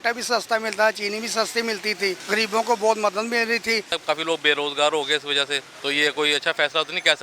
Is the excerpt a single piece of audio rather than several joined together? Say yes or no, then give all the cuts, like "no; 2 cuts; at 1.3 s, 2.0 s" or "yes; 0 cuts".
no; 3 cuts; at 2.2 s, 4.0 s, 5.7 s